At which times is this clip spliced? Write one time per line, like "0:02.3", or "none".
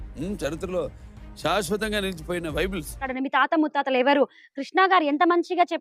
0:03.1